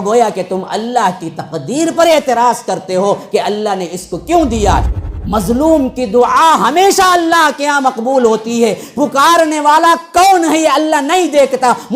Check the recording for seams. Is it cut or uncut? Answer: cut